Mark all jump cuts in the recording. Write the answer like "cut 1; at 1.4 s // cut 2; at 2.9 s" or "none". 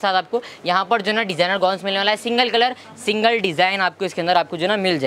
none